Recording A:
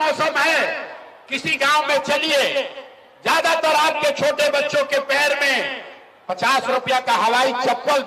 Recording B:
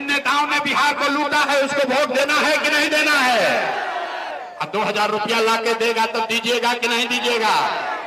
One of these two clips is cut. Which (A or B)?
B